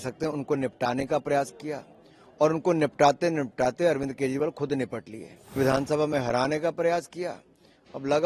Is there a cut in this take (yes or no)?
yes